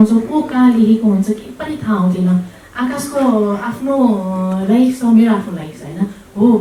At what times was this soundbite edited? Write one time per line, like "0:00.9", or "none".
none